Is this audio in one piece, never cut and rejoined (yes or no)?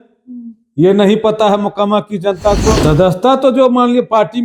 no